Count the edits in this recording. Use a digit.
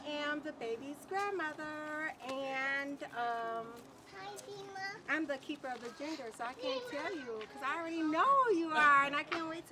0